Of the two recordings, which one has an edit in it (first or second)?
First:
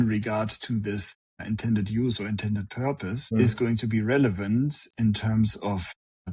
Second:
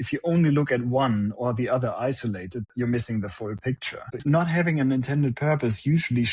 second